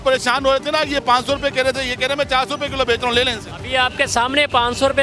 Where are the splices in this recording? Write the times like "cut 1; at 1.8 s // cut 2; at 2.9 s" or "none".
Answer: none